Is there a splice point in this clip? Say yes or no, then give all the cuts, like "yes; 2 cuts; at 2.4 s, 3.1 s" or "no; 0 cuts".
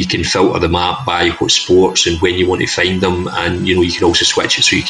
no; 0 cuts